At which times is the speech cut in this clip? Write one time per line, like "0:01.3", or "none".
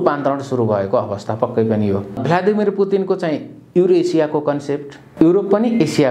0:02.1
0:05.0